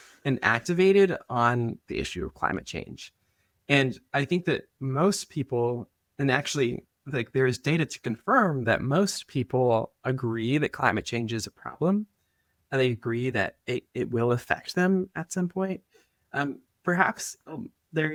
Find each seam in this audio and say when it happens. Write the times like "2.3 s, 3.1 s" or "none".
none

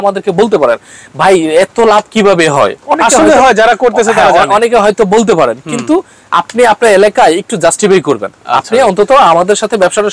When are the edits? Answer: none

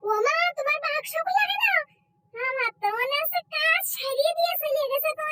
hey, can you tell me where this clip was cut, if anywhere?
none

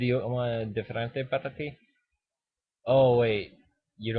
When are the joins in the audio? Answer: 1.9 s

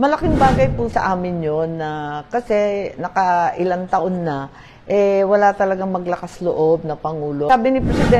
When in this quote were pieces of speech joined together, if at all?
0.9 s, 7.5 s

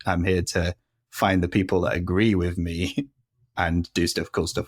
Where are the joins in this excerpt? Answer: none

